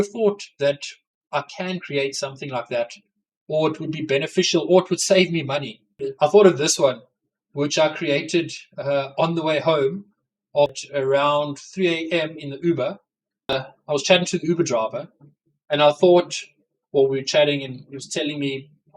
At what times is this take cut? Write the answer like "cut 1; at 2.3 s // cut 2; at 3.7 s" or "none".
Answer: cut 1; at 6.0 s // cut 2; at 10.8 s // cut 3; at 13.6 s